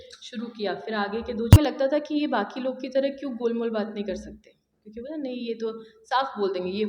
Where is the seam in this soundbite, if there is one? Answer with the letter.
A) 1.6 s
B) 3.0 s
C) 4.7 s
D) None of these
A